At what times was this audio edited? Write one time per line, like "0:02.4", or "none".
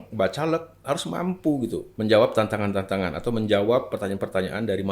0:01.9